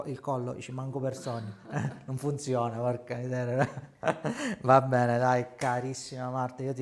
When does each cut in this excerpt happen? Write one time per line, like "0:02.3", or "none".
none